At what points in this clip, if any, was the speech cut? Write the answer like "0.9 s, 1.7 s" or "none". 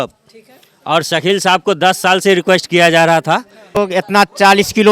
3.8 s